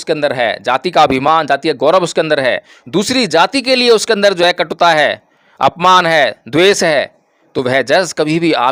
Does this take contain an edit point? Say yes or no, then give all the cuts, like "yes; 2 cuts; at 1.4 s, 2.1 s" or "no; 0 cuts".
no; 0 cuts